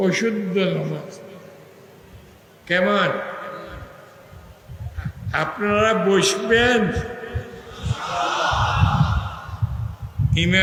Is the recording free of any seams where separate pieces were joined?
yes; 0 cuts

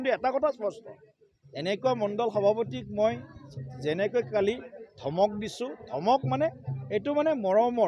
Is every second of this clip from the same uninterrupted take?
yes; 0 cuts

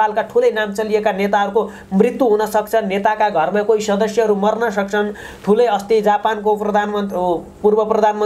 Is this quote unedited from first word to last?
yes; 0 cuts

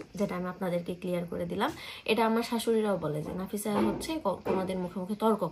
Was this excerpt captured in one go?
yes; 0 cuts

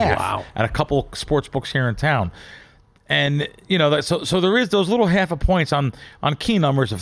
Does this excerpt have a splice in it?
no; 0 cuts

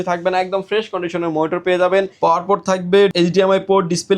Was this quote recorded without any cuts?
no; 2 cuts; at 2.1 s, 3.1 s

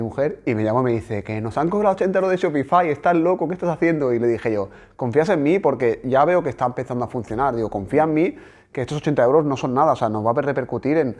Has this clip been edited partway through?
no; 0 cuts

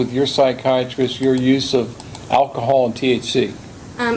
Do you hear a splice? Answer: no; 0 cuts

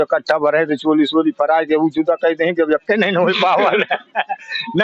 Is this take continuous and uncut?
yes; 0 cuts

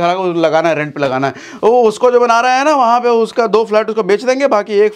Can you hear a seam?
no; 0 cuts

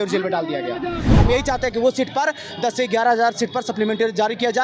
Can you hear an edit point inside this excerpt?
yes; 1 cut; at 1.1 s

